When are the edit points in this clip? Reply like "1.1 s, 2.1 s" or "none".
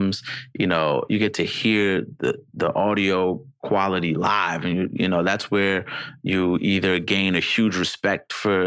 1.0 s